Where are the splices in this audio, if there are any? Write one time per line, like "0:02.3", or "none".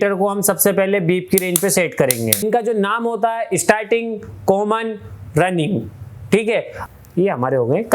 0:02.4
0:06.8